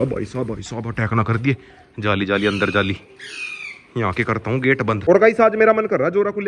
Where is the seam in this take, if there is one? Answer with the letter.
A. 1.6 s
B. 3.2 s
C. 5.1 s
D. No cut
C